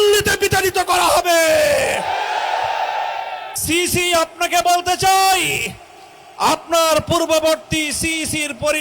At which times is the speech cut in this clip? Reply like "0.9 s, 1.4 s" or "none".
3.5 s